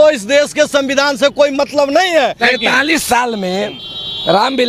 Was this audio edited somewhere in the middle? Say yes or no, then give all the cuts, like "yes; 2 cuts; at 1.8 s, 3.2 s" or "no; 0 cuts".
yes; 1 cut; at 2.4 s